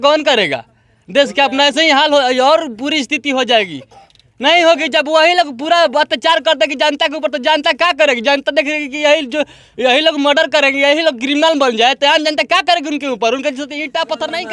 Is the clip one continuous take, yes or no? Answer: yes